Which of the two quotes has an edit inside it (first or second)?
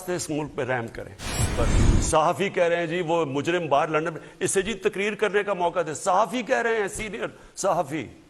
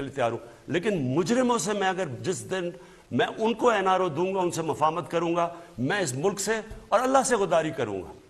first